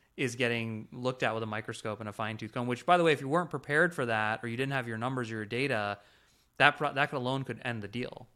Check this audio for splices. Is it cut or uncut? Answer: uncut